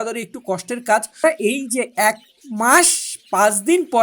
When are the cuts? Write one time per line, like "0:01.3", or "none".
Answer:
0:01.2